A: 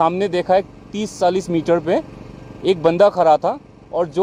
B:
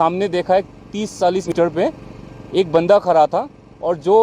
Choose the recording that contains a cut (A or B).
B